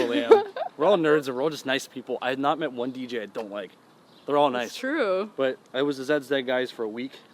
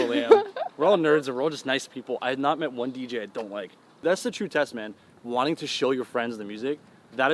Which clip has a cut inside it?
second; 1 cut; at 4.0 s

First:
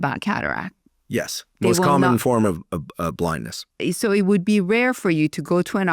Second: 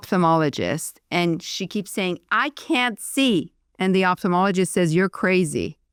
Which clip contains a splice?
first; 1 cut; at 3.6 s

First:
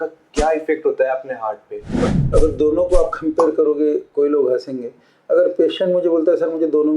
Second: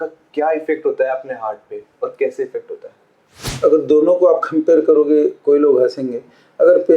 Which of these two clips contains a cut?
first; 1 cut; at 2.1 s

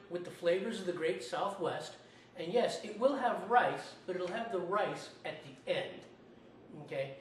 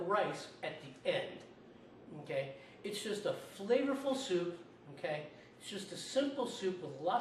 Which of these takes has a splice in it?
first; 1 cut; at 1.2 s

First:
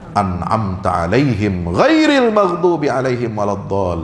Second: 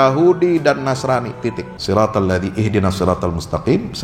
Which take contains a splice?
second; 1 cut; at 1.7 s

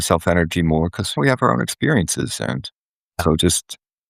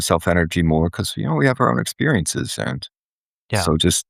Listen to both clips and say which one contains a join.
first; 2 cuts; at 1.1 s, 3.2 s

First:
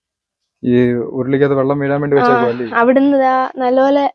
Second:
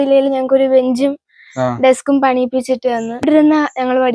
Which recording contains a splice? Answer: second; 1 cut; at 3.2 s

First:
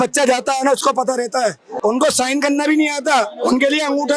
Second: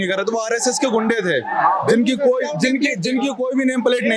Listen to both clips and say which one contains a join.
first; 1 cut; at 1.7 s

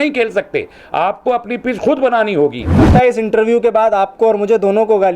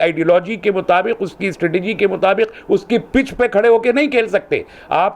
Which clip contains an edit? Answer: first; 1 cut; at 2.8 s

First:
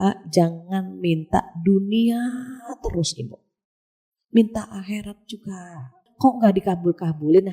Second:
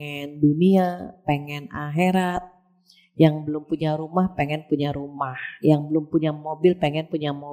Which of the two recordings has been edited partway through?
first; 1 cut; at 6.0 s

